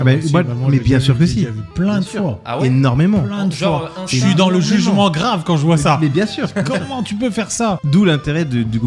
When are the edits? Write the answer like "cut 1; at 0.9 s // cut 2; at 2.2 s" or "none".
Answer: cut 1; at 7.8 s